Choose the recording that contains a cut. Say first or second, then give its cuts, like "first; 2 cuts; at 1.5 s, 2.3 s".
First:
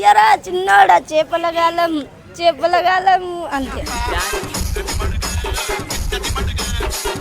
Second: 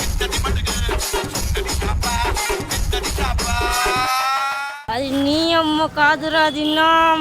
second; 1 cut; at 4.8 s